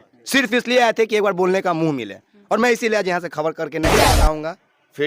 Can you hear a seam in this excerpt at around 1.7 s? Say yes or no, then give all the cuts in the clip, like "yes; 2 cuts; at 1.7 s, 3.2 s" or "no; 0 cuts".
no; 1 cut; at 4.0 s